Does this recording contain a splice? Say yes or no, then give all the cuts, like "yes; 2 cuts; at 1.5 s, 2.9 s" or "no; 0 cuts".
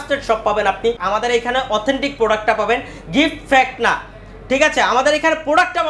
yes; 1 cut; at 1.0 s